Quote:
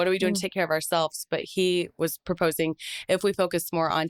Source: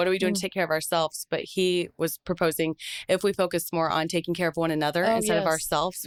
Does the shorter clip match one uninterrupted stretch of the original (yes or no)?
yes